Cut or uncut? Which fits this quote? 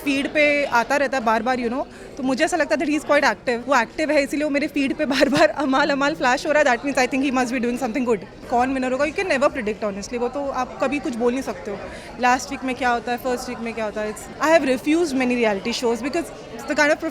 cut